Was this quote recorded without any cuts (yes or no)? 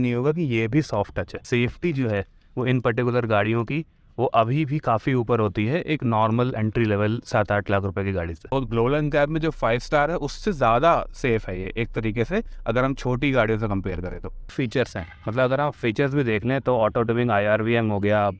no